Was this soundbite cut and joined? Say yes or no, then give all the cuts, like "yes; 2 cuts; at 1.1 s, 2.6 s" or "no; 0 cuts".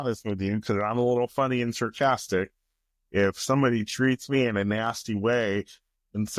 no; 0 cuts